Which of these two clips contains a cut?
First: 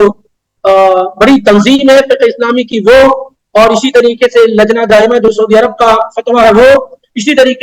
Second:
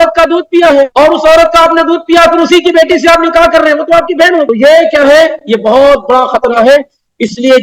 second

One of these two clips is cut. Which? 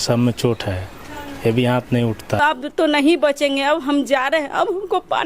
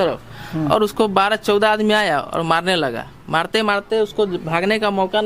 first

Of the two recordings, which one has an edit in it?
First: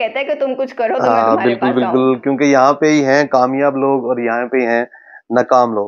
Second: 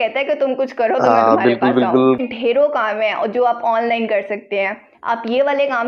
second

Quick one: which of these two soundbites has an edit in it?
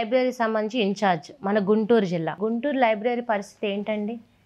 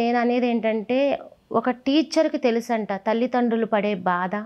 first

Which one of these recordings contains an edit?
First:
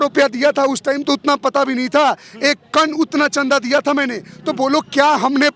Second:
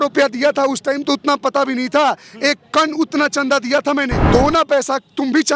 second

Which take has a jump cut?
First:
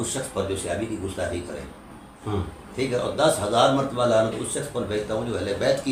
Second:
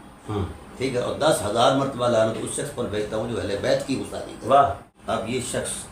second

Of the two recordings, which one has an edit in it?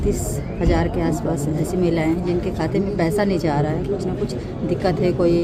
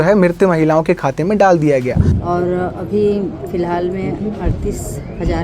second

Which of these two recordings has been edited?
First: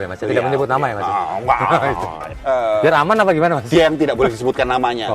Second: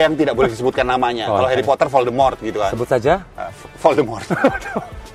first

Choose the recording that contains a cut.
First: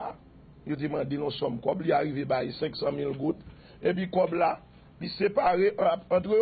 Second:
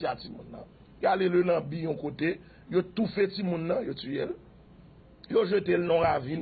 first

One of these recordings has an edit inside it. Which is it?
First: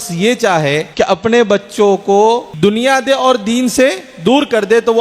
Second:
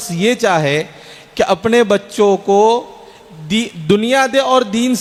first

